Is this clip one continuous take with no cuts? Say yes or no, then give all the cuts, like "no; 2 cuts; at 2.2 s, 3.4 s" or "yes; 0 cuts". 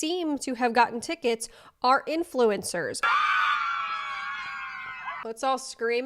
no; 2 cuts; at 3.1 s, 5.2 s